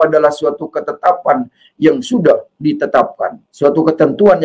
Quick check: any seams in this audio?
yes; 1 cut; at 3.4 s

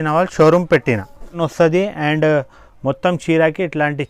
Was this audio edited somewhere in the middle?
yes; 1 cut; at 1.4 s

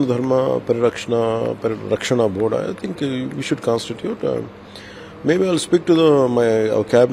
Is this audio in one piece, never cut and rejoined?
yes; 0 cuts

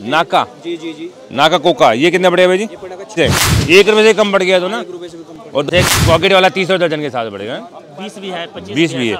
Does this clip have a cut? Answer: yes; 2 cuts; at 3.2 s, 5.7 s

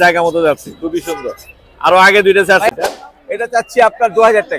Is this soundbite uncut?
no; 1 cut; at 2.7 s

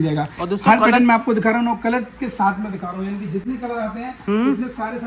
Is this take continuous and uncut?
yes; 0 cuts

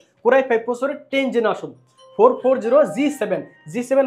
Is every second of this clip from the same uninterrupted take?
yes; 0 cuts

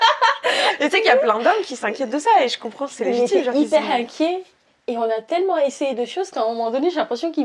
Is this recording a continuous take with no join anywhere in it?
yes; 0 cuts

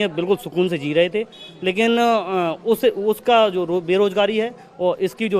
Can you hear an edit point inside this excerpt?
no; 0 cuts

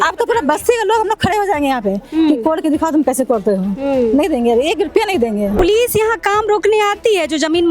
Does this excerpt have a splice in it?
yes; 1 cut; at 5.6 s

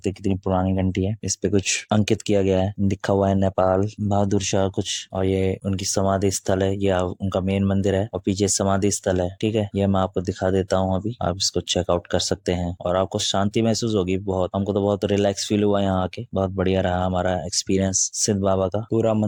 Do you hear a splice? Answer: no; 0 cuts

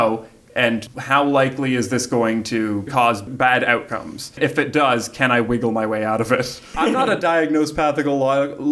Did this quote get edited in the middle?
yes; 4 cuts; at 0.9 s, 2.9 s, 4.4 s, 6.7 s

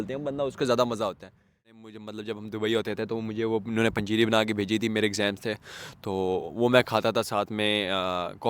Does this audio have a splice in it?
yes; 1 cut; at 1.8 s

